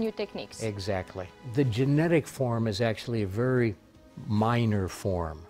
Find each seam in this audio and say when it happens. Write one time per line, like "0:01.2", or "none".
0:01.4